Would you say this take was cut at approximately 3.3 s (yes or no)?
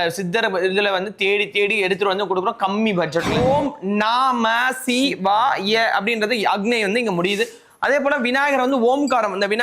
yes